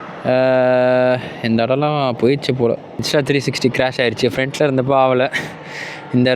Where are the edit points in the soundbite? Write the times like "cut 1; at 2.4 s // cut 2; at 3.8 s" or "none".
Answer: cut 1; at 3.0 s